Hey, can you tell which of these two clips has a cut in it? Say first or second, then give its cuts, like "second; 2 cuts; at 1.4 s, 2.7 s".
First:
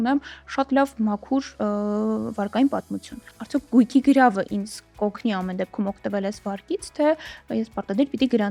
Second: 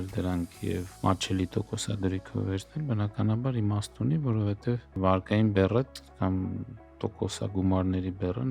second; 2 cuts; at 0.9 s, 5.0 s